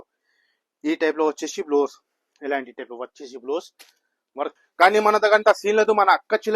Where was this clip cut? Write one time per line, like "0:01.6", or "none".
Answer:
0:04.6